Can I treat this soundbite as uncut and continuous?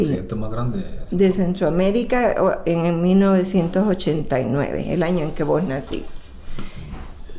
yes; 0 cuts

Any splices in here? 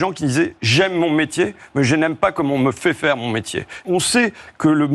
yes; 1 cut; at 3.8 s

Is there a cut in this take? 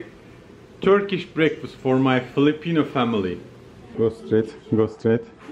yes; 1 cut; at 3.9 s

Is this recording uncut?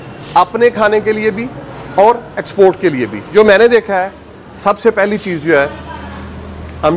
no; 1 cut; at 3.3 s

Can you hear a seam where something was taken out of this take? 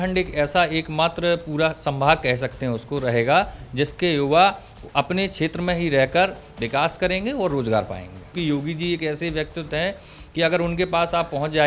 yes; 1 cut; at 8.3 s

